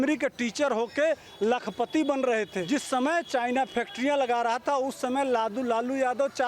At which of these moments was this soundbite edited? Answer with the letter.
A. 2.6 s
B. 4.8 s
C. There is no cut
A